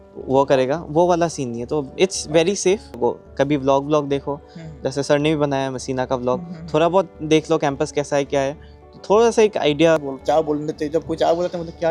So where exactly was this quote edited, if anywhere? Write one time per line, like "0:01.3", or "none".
0:03.0
0:10.1